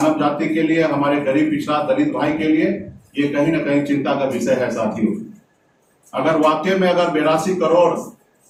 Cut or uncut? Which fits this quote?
uncut